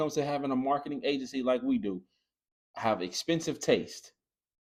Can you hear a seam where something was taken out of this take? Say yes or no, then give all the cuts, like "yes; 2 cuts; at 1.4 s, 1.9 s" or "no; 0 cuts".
no; 0 cuts